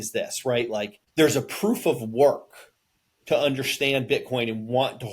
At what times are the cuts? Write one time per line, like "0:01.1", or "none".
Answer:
0:01.0